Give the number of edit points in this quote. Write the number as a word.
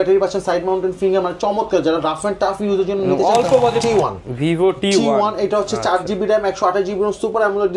one